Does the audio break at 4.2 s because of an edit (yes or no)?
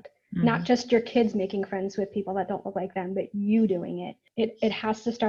yes